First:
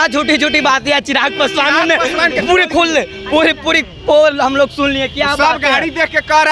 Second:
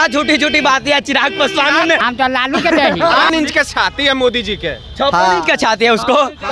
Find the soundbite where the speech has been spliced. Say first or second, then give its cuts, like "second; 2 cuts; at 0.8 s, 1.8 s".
second; 2 cuts; at 2.0 s, 3.3 s